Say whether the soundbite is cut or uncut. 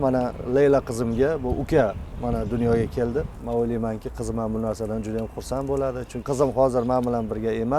cut